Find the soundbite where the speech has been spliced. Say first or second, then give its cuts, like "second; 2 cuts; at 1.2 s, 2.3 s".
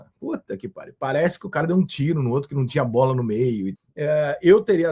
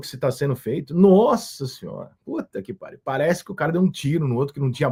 first; 1 cut; at 3.8 s